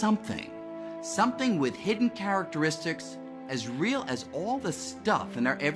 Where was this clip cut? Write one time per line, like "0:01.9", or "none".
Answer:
0:04.6